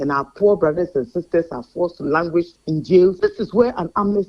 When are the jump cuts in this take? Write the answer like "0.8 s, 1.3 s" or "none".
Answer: 3.2 s